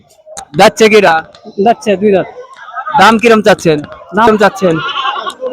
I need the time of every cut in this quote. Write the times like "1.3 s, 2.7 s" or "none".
4.3 s